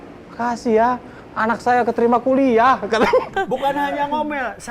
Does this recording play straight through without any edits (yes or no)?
no